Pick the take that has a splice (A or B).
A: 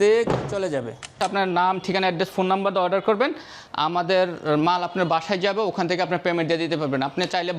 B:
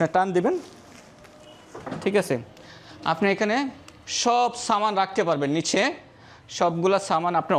A